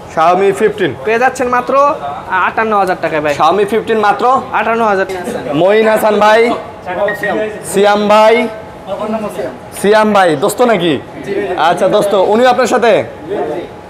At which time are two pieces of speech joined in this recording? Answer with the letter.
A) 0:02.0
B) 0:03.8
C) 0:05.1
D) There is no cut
C